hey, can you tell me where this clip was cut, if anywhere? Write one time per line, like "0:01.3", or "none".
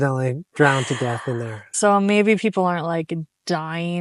0:01.7